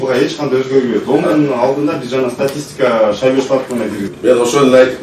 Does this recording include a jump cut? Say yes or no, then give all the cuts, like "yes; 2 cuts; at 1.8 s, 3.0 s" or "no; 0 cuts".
no; 0 cuts